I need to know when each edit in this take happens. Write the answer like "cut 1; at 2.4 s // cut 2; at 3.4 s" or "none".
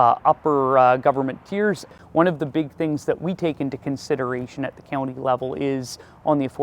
cut 1; at 1.9 s